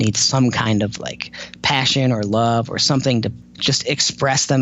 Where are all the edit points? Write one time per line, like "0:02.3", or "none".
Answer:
0:03.5